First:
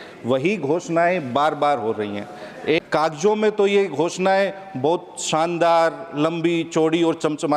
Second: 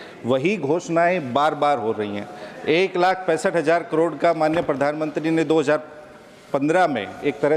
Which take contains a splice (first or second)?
first